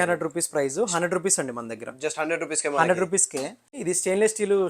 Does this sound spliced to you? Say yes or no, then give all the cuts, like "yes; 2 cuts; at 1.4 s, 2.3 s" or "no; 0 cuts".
yes; 1 cut; at 3.6 s